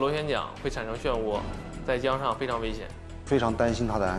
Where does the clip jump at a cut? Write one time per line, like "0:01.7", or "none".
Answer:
0:03.3

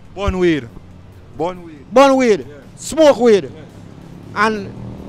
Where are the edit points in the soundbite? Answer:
none

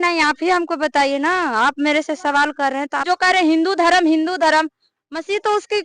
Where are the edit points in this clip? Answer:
0:03.0

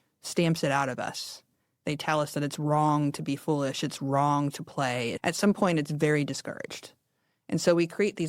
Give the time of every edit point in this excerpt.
0:05.1

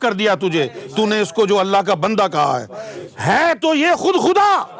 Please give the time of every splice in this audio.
none

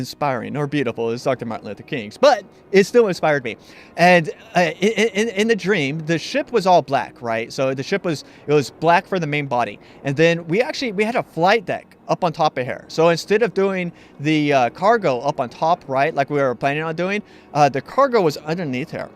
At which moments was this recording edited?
0:06.0

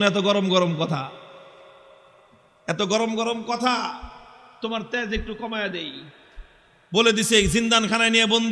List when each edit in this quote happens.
none

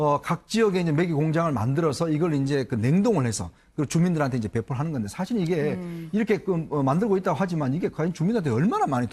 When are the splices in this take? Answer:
0:07.8

